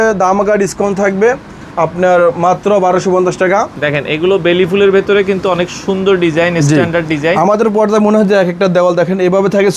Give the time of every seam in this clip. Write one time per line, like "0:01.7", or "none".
0:03.8